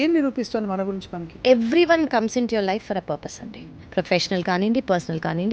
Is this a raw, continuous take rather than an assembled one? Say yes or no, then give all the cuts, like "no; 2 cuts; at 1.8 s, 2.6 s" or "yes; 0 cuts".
no; 2 cuts; at 1.3 s, 3.8 s